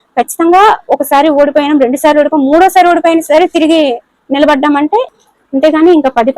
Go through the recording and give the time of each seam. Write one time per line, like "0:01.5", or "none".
0:05.1